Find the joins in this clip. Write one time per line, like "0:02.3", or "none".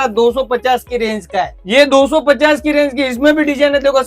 0:01.6